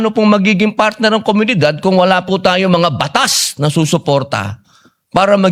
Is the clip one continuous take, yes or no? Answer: yes